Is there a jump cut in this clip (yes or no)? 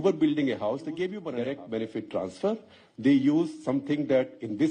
yes